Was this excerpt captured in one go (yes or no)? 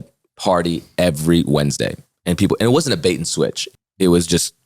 no